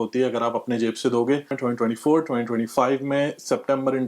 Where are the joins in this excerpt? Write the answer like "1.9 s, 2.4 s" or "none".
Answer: 1.5 s